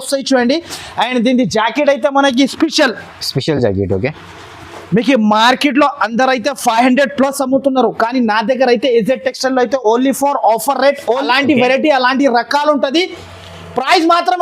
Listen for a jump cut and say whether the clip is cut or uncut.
cut